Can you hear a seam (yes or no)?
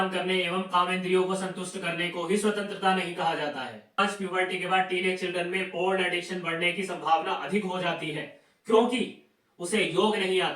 yes